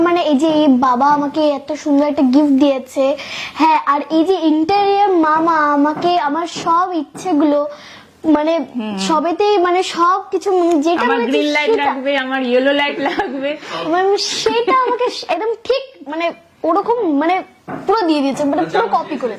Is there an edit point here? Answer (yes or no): no